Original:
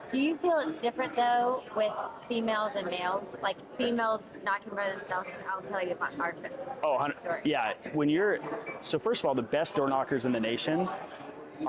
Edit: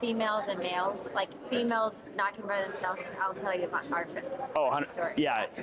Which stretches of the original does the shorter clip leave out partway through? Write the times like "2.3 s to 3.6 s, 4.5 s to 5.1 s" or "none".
none